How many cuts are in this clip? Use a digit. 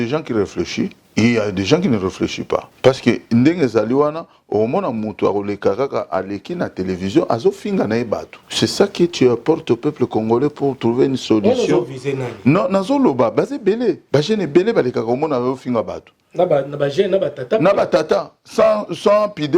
4